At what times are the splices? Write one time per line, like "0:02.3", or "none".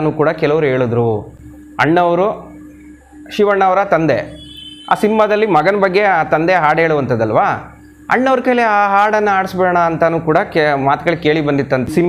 none